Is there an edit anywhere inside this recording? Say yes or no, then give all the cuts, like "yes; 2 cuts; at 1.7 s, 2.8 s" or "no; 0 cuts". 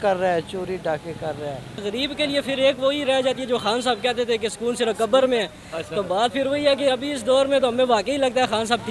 yes; 1 cut; at 1.8 s